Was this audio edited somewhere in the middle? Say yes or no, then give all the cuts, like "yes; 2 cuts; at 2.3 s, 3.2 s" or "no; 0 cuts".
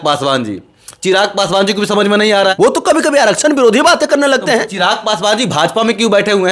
yes; 1 cut; at 2.5 s